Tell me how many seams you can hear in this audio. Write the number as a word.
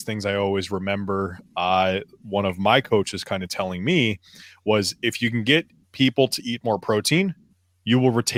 zero